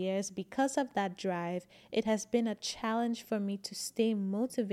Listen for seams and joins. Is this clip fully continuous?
yes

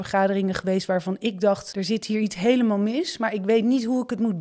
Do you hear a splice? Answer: yes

